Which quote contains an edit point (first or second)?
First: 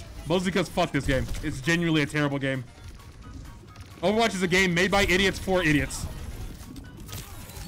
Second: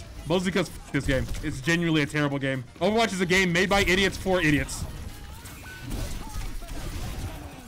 second